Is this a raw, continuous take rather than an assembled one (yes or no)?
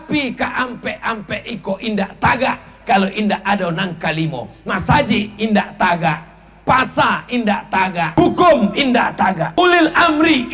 no